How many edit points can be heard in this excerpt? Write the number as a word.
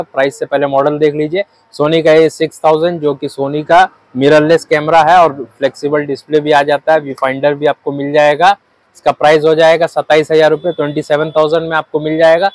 zero